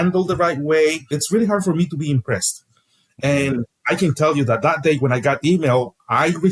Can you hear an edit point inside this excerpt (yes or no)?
yes